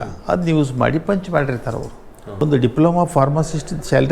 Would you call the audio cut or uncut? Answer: cut